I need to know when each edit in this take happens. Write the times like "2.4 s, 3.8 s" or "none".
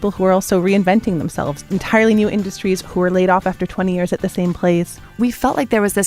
1.6 s, 5.2 s